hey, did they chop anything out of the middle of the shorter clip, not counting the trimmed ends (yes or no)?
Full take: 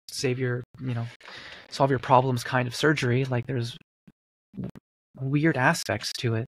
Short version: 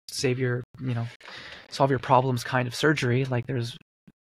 no